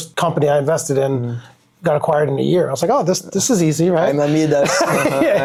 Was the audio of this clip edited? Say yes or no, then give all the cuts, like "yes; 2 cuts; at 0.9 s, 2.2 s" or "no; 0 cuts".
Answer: no; 0 cuts